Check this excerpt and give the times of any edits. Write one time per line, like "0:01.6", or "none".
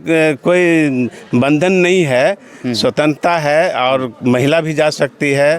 none